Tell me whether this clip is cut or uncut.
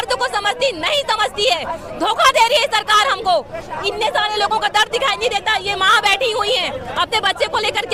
uncut